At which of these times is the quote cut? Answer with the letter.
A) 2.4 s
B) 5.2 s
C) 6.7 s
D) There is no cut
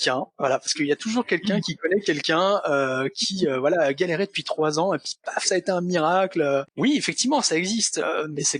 C